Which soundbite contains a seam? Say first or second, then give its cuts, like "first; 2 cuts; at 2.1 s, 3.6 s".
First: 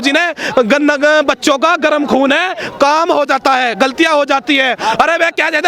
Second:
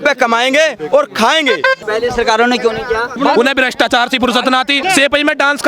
second; 1 cut; at 1.6 s